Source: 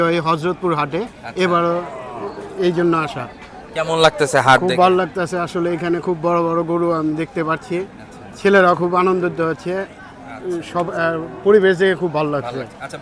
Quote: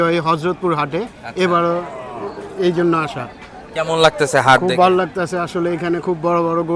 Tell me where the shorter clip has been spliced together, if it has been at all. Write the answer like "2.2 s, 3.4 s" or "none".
none